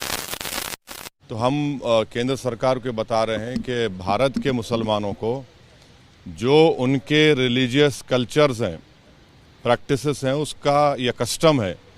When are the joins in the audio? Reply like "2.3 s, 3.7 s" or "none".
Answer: 1.1 s